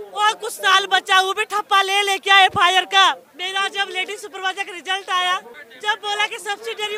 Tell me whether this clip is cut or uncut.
uncut